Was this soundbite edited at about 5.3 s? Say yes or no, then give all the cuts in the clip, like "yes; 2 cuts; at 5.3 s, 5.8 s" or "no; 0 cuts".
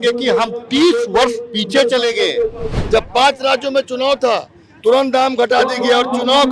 no; 1 cut; at 2.7 s